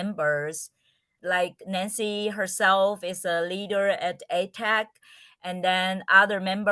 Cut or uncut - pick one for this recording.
cut